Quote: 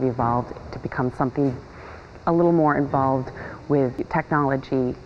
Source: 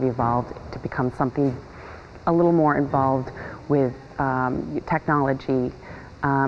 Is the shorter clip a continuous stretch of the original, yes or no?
no